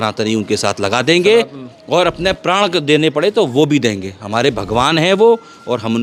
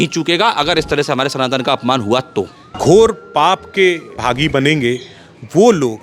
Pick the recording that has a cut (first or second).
second